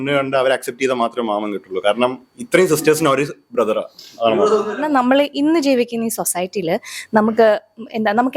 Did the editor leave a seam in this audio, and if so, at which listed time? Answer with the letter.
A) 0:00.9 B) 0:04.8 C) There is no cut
B